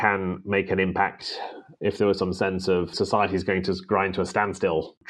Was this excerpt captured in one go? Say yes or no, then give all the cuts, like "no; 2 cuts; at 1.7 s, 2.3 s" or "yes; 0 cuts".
yes; 0 cuts